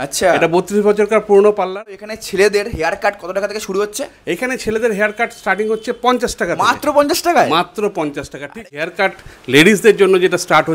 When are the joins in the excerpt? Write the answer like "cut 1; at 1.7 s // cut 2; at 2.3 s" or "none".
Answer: cut 1; at 2.1 s // cut 2; at 8.7 s